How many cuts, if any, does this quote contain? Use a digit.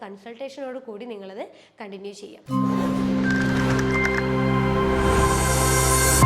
1